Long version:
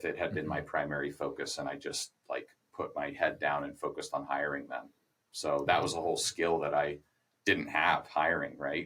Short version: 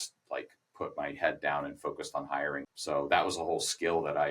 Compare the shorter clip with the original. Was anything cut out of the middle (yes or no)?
yes